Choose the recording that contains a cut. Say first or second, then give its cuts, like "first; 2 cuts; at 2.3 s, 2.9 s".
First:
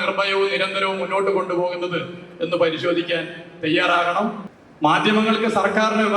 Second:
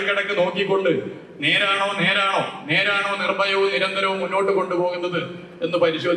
first; 1 cut; at 4.5 s